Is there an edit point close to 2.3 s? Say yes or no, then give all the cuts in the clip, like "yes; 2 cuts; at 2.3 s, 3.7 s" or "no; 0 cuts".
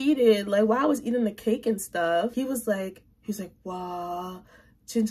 yes; 1 cut; at 2.3 s